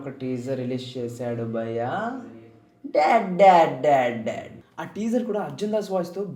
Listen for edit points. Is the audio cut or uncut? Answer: uncut